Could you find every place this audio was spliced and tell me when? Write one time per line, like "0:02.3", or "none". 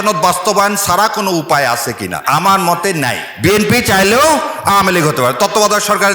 0:02.2
0:03.2